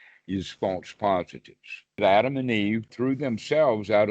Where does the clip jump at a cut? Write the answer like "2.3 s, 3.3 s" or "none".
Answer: 2.0 s, 2.9 s